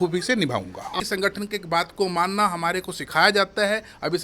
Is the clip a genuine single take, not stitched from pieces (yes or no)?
no